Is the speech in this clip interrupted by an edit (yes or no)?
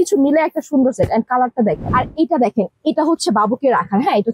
yes